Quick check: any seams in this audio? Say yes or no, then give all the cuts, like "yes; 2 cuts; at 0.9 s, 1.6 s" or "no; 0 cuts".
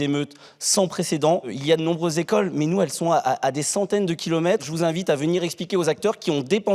yes; 2 cuts; at 1.5 s, 4.7 s